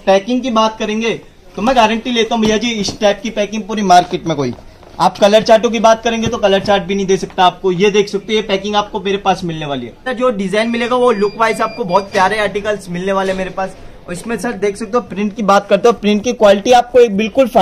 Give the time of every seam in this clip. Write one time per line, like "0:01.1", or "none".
0:10.0